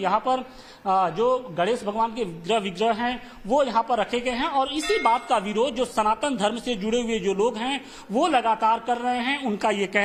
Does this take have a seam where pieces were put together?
no; 0 cuts

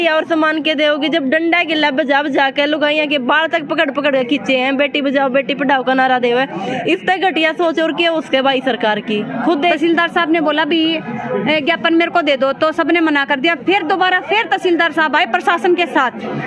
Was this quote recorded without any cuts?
no; 1 cut; at 9.8 s

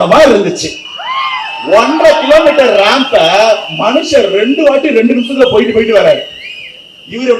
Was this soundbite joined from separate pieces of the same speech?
no; 0 cuts

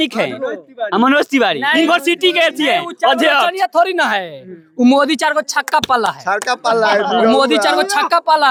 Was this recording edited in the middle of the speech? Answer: no; 0 cuts

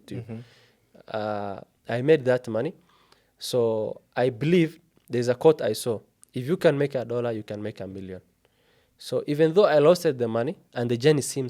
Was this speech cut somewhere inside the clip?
no; 0 cuts

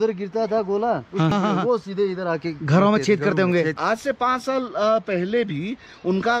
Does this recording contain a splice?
yes; 2 cuts; at 1.3 s, 3.8 s

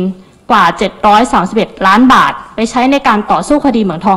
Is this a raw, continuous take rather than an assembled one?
yes; 0 cuts

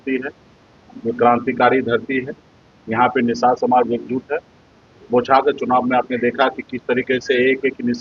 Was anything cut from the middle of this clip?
no; 0 cuts

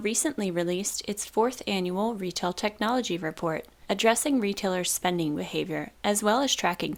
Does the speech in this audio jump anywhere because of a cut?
no; 0 cuts

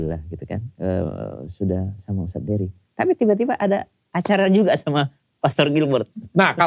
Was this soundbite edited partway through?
no; 0 cuts

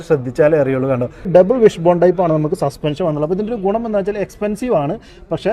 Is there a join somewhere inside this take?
yes; 1 cut; at 1.3 s

